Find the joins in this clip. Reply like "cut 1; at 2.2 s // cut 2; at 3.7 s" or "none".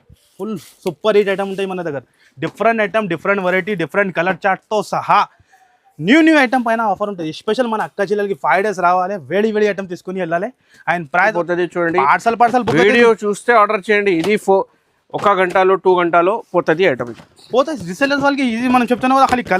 cut 1; at 11.3 s

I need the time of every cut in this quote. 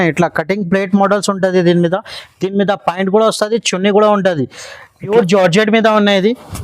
cut 1; at 5.1 s

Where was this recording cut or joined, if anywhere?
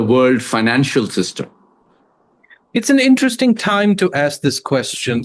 none

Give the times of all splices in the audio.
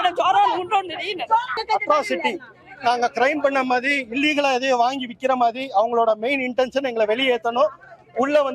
cut 1; at 1.5 s

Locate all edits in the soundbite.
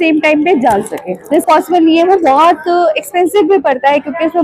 cut 1; at 1.4 s

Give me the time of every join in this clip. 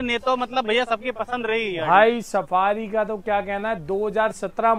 none

